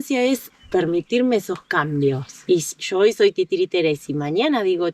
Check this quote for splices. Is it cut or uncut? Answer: uncut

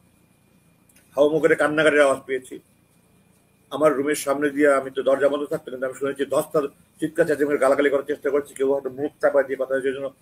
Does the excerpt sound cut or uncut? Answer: uncut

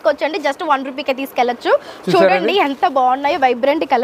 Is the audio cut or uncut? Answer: uncut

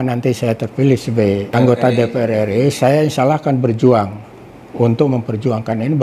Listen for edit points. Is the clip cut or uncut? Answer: cut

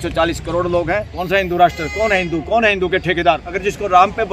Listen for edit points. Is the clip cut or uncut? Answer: cut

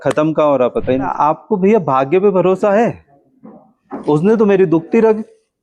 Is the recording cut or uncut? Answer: cut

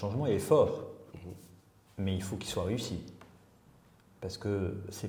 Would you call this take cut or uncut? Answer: uncut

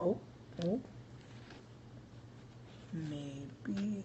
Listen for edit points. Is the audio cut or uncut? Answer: cut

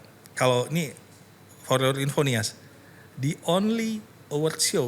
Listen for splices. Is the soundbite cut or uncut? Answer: uncut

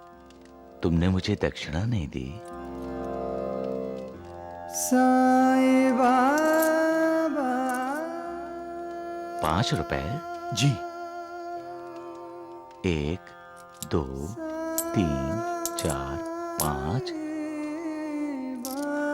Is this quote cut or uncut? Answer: cut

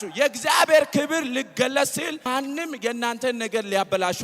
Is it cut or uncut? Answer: cut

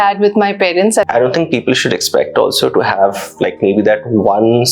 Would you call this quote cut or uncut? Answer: cut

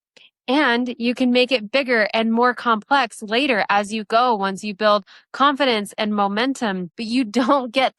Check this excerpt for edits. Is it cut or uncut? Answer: cut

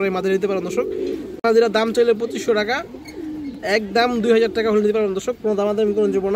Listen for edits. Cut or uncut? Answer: uncut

